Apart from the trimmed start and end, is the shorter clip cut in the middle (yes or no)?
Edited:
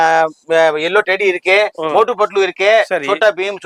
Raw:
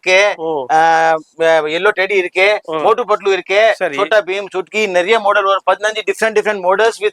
no